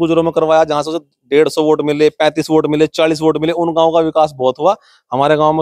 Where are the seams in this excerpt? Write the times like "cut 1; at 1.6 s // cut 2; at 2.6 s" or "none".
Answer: none